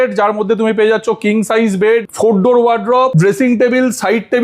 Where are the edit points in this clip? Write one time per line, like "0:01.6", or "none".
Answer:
0:02.1
0:03.1